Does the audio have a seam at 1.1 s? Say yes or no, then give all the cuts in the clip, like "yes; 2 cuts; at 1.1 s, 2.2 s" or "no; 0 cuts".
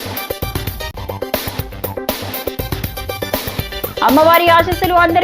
no; 1 cut; at 4.0 s